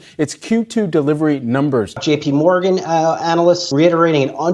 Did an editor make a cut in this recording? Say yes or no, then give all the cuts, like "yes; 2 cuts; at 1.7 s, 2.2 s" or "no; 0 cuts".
yes; 2 cuts; at 2.0 s, 3.7 s